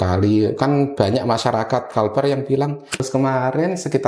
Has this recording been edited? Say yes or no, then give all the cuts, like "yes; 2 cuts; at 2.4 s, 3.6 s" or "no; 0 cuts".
yes; 1 cut; at 3.0 s